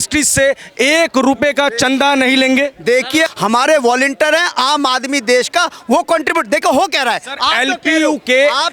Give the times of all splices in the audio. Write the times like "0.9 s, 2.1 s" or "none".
3.3 s